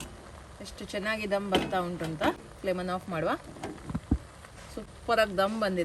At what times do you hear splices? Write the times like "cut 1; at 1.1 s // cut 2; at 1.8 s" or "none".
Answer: none